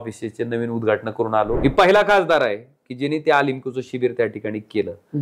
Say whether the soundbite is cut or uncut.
cut